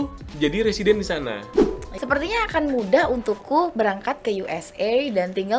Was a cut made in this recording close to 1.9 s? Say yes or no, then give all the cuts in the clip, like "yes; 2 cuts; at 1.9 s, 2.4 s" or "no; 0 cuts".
yes; 1 cut; at 1.9 s